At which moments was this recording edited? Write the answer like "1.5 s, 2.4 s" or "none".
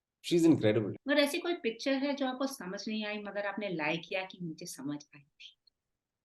0.9 s